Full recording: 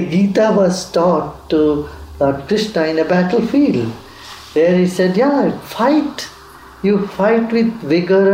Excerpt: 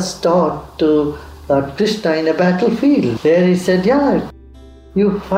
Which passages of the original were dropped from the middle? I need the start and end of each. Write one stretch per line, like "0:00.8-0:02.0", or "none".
0:03.9-0:04.5
0:05.7-0:06.2